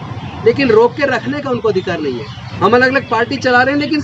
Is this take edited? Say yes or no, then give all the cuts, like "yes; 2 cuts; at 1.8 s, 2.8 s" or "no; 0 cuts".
yes; 1 cut; at 2.4 s